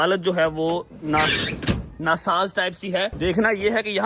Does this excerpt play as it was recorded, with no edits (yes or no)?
no